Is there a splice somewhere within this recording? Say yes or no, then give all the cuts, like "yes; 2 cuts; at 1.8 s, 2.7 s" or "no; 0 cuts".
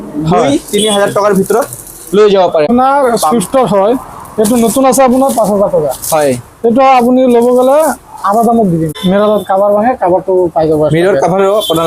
yes; 2 cuts; at 2.7 s, 8.9 s